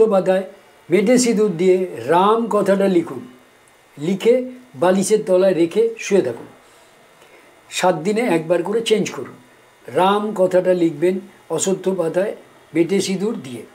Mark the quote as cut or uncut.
uncut